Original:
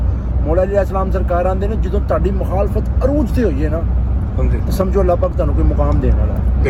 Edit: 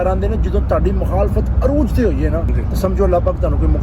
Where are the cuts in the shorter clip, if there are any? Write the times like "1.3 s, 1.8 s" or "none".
2.6 s

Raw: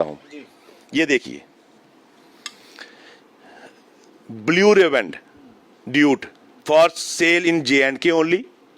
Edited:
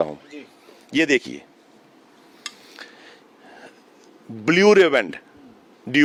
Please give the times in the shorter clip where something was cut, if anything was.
none

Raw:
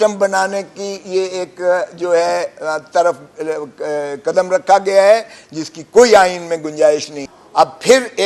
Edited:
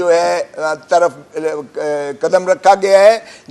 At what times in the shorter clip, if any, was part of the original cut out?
none

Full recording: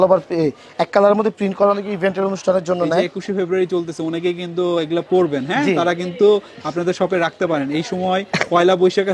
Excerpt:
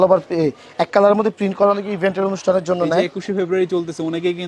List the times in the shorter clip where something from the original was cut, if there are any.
none

